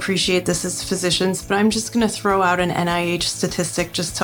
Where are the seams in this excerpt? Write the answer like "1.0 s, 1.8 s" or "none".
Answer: none

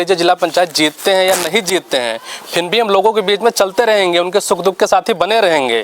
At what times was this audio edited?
none

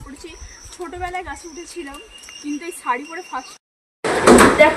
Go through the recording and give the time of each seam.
3.7 s

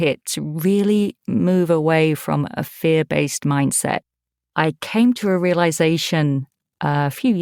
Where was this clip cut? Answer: none

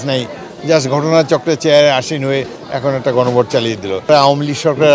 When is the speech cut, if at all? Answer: 4.0 s

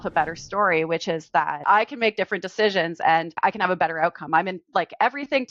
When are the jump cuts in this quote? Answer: 1.6 s, 3.4 s

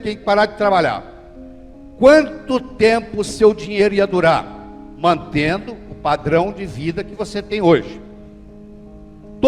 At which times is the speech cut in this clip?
none

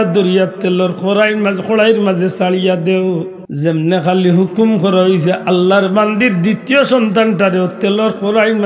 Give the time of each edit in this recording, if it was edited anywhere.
3.4 s

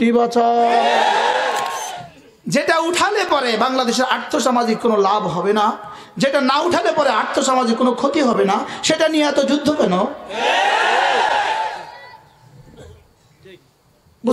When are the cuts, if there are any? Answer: 1.8 s

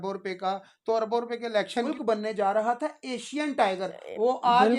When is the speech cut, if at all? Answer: 1.9 s

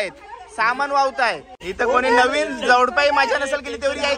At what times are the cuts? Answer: 1.7 s

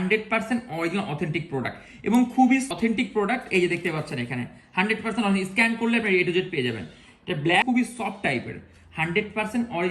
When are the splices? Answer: 2.7 s, 7.6 s

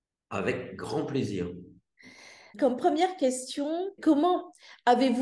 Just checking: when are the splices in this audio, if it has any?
2.4 s, 4.0 s

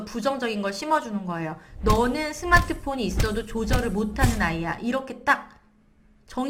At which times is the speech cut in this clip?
none

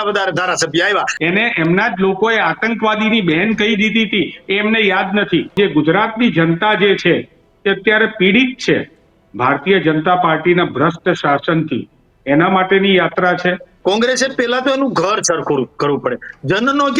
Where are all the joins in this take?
1.1 s, 5.5 s, 13.7 s

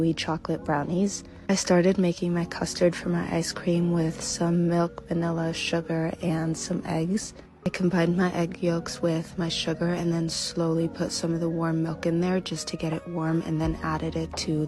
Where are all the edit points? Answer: none

